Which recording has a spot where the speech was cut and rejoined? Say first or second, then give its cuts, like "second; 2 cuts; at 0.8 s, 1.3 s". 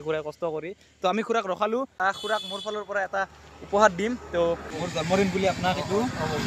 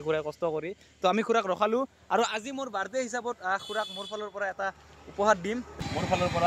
first; 2 cuts; at 1.9 s, 4.6 s